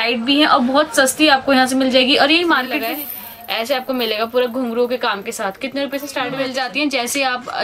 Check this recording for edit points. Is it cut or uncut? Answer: cut